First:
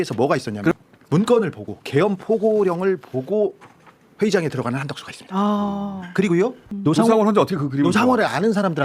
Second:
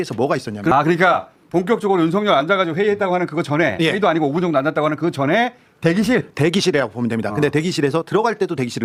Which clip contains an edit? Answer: first; 2 cuts; at 0.7 s, 6.7 s

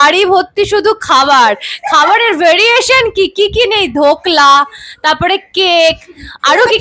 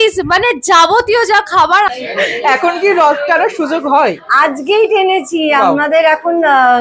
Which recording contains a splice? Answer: second; 1 cut; at 1.9 s

